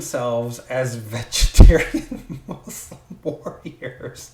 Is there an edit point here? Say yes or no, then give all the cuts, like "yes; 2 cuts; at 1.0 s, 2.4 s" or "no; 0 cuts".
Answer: no; 0 cuts